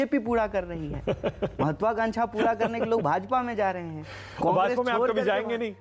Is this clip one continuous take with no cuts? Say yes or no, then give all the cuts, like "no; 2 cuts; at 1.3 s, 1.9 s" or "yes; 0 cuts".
yes; 0 cuts